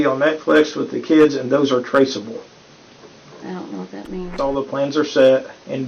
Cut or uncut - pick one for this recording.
cut